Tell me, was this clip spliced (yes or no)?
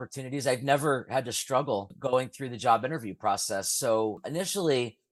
no